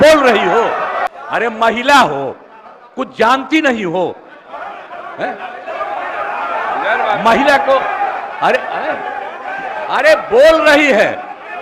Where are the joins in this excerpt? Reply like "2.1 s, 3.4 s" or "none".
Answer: 1.0 s